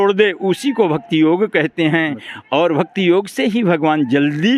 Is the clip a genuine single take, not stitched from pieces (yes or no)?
yes